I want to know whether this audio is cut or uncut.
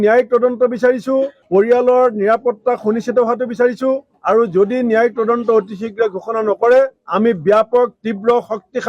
uncut